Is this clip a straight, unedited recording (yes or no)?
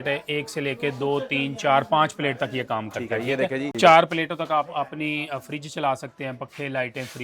no